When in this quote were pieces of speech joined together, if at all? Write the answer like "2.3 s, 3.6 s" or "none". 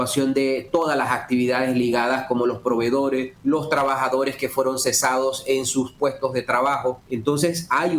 3.3 s, 7.1 s